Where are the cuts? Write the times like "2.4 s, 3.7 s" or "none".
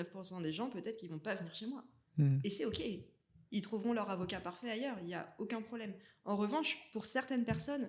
none